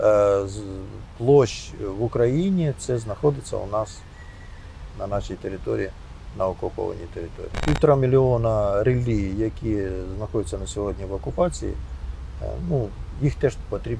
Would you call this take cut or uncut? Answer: cut